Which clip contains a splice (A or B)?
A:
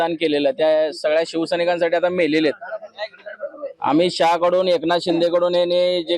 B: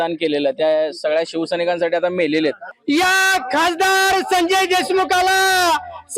B